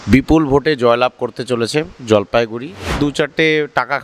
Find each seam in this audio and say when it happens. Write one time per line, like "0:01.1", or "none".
0:03.0